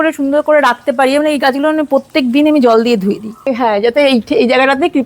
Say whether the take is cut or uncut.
cut